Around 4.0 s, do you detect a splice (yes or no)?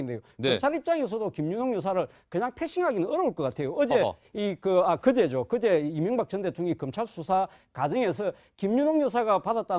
yes